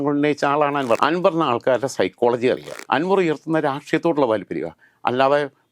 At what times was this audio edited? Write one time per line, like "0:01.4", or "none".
0:01.0
0:02.7